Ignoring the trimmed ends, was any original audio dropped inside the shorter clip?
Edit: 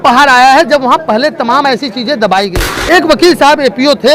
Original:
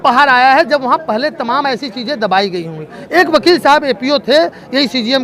yes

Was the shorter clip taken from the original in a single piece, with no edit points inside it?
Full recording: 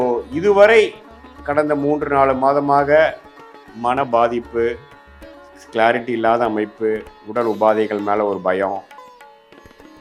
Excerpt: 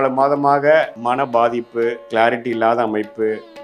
no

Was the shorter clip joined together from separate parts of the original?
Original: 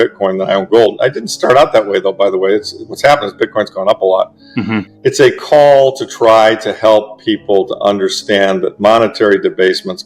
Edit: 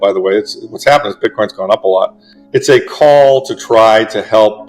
yes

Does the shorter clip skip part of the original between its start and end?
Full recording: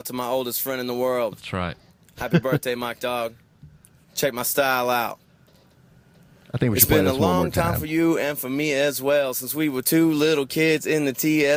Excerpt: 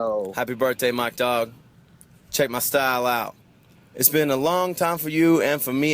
yes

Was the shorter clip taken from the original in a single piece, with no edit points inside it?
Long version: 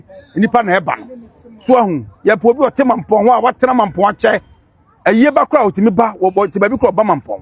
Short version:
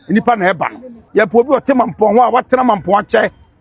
no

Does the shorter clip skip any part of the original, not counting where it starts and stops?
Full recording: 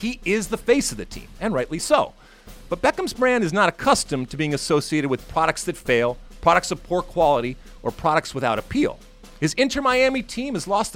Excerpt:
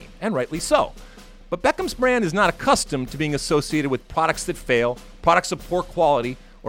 no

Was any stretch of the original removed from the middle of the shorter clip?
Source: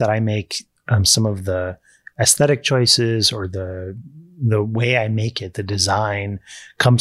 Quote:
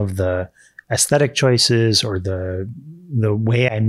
no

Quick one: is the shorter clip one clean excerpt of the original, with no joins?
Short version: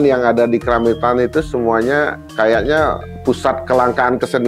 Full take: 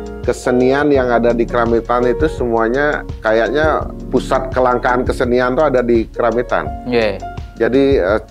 yes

